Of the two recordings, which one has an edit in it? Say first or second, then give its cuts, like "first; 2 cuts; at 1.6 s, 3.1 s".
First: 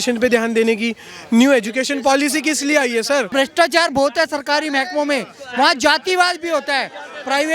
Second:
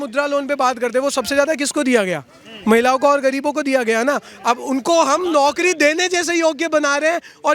first; 1 cut; at 3.3 s